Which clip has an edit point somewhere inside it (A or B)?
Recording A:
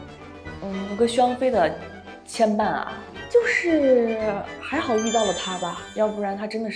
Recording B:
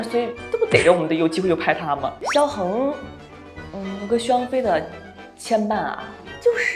B